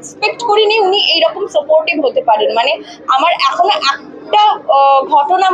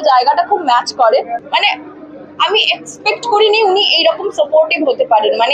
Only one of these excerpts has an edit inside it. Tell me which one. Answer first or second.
second